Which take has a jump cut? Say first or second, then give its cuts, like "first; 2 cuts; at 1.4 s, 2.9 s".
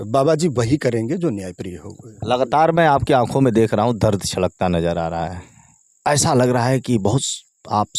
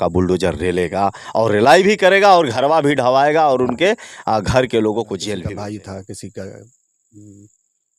second; 1 cut; at 5.4 s